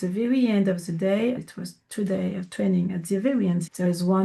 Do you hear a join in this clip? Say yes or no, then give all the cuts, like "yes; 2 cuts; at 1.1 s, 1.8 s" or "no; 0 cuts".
no; 0 cuts